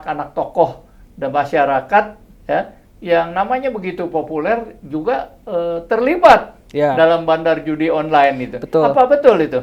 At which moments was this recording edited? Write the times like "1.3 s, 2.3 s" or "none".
none